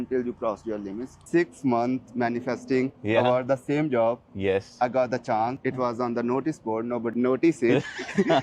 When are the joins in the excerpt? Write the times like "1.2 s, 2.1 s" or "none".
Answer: 1.2 s, 7.1 s

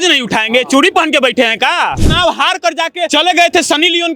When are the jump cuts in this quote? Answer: 2.0 s, 3.1 s

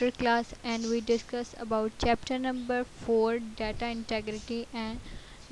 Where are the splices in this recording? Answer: none

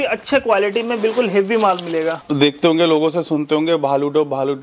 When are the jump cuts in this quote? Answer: 2.2 s

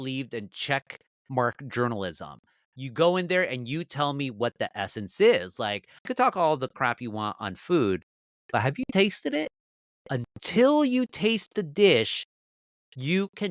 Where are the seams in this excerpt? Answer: 6.1 s

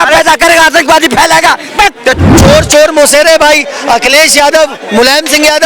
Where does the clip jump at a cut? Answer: 2.2 s

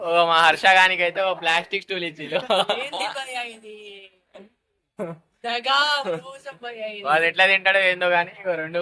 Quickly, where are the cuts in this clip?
2.6 s

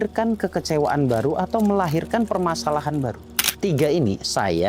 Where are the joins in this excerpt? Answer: 3.5 s

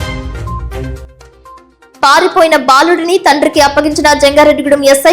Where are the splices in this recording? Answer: 1.8 s

